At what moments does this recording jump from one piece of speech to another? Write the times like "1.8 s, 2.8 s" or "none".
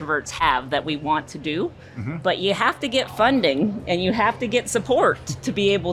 none